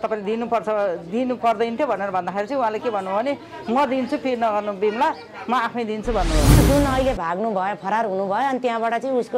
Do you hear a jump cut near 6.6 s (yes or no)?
yes